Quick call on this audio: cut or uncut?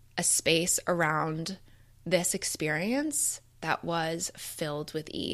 uncut